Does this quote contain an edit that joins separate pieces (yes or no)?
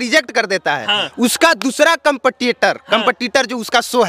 no